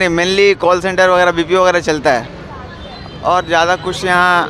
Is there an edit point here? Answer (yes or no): no